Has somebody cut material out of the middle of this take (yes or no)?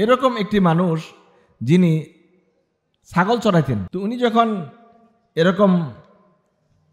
yes